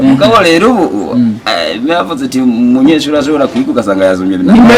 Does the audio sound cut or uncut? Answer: uncut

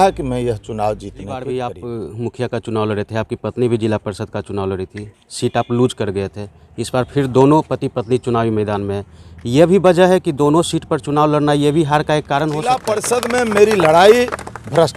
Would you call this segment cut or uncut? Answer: cut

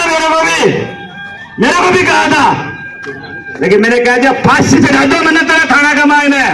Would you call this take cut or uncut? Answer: uncut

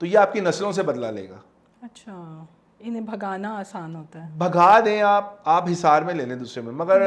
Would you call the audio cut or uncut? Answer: uncut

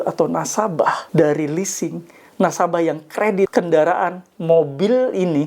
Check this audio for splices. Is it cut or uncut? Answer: cut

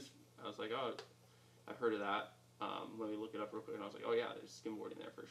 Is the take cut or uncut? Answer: uncut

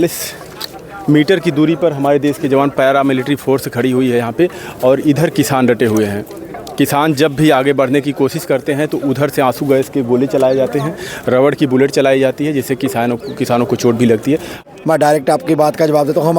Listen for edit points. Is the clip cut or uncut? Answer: cut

